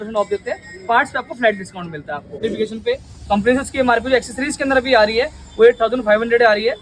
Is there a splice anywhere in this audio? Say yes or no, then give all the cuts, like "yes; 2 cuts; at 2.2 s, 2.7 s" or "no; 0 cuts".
yes; 1 cut; at 2.4 s